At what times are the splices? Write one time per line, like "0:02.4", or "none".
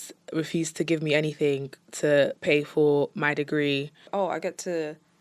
0:04.0